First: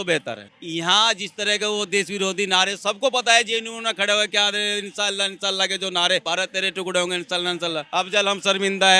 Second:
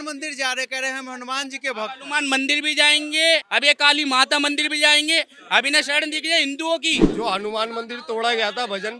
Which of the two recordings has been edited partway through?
first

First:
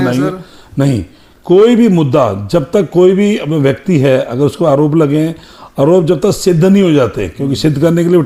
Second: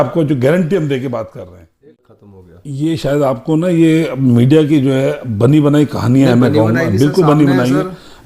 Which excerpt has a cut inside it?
second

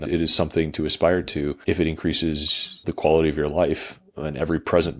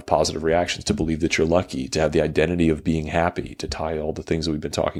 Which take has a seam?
first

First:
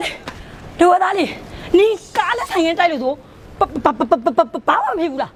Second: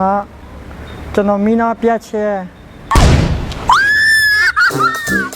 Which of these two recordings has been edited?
second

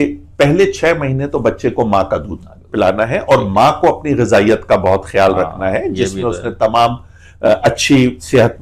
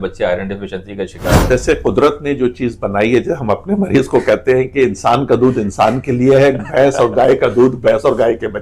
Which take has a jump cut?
second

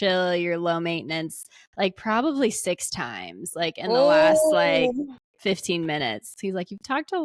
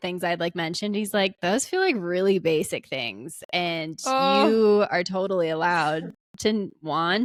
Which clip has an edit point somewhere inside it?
first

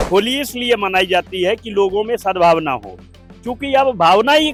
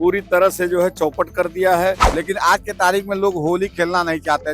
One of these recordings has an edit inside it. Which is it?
second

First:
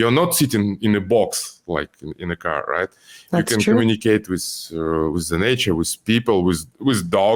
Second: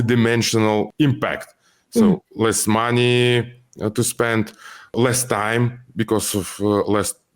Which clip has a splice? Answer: second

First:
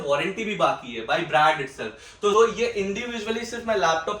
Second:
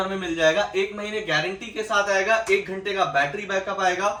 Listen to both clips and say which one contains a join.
first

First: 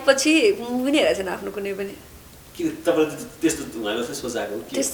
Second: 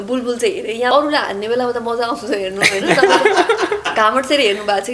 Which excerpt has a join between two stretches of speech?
second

